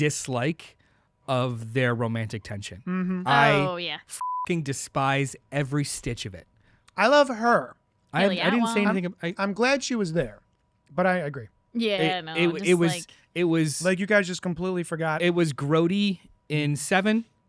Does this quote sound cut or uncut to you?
uncut